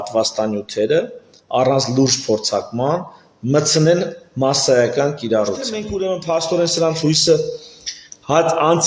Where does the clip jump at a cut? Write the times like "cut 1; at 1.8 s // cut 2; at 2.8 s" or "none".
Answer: cut 1; at 5.8 s